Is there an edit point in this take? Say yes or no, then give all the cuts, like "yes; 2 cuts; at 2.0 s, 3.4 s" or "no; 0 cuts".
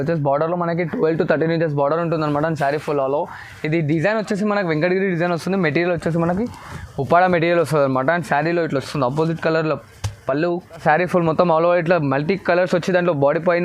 yes; 1 cut; at 10.8 s